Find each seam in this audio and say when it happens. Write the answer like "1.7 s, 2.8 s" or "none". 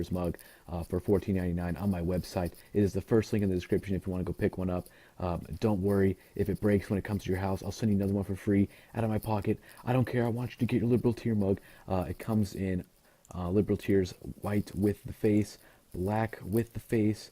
15.3 s